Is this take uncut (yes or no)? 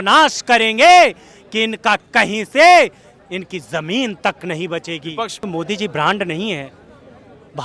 no